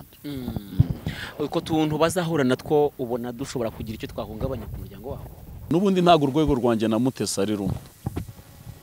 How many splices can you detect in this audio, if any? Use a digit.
1